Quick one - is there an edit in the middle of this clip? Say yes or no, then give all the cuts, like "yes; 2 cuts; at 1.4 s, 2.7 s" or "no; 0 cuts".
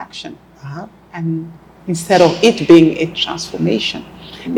no; 0 cuts